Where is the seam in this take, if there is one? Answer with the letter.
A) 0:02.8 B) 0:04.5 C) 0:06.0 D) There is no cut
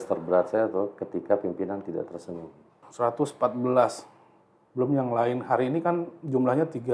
A